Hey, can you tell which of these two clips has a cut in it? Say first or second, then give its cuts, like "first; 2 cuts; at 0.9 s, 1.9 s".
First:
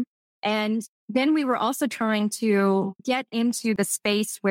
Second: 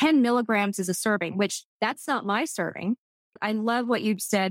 first; 1 cut; at 3.4 s